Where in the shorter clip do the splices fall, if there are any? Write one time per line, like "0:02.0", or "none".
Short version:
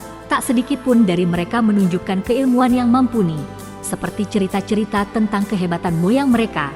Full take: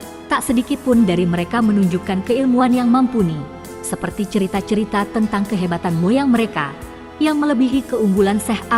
none